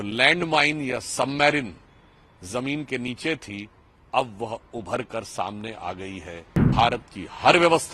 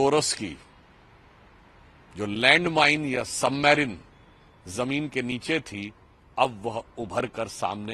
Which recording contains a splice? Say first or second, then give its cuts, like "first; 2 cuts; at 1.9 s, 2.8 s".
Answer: first; 1 cut; at 6.7 s